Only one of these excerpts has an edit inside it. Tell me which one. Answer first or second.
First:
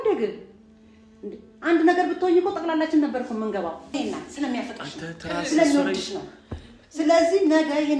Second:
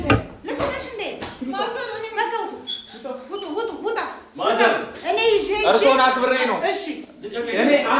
first